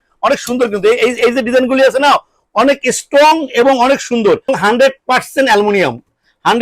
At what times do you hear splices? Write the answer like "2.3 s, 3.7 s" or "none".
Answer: 4.5 s